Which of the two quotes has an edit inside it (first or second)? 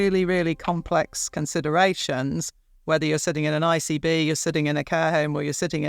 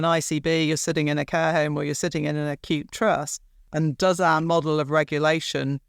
second